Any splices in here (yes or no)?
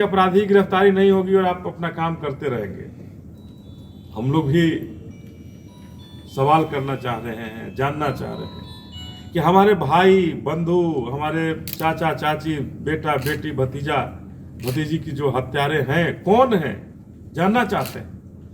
no